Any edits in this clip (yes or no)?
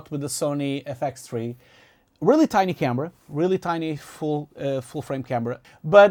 no